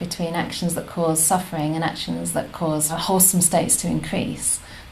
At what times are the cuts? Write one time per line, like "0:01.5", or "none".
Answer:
0:03.0